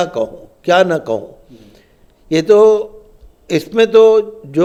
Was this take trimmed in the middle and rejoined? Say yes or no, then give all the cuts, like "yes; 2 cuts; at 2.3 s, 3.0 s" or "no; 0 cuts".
no; 0 cuts